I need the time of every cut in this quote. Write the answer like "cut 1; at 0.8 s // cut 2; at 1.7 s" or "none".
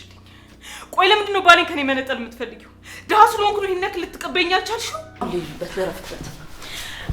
cut 1; at 5.2 s